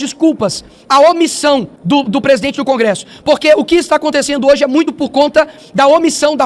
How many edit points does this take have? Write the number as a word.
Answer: one